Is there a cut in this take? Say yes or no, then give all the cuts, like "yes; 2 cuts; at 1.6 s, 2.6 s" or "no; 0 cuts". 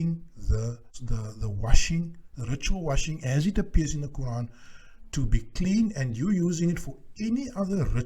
yes; 1 cut; at 1.0 s